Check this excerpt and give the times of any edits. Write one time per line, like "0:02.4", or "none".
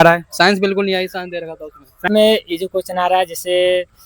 0:02.0